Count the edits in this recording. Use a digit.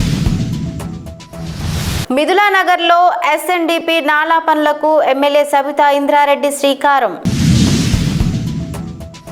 0